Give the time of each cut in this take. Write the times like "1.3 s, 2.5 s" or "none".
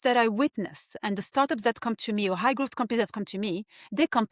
none